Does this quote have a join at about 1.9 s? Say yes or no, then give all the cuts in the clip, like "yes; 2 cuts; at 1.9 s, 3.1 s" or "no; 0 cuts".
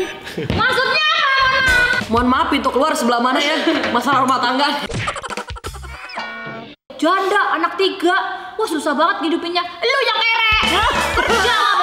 yes; 2 cuts; at 1.9 s, 6.9 s